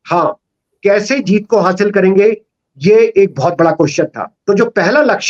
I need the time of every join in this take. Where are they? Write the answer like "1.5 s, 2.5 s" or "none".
4.3 s